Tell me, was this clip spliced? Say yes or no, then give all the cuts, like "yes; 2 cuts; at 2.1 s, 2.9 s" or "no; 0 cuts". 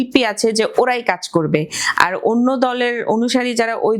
no; 0 cuts